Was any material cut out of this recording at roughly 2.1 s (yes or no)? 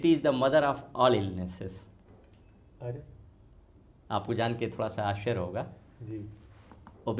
no